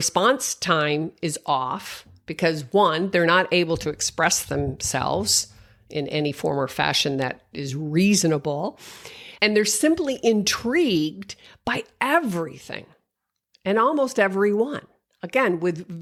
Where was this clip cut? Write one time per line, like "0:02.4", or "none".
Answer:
none